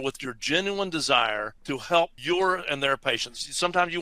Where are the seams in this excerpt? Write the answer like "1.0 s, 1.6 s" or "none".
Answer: 2.0 s